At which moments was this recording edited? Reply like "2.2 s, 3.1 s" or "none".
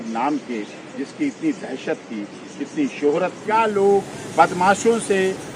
3.4 s